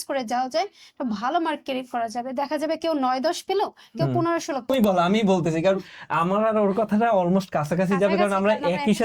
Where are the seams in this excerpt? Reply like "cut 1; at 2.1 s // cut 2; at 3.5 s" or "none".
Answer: cut 1; at 4.7 s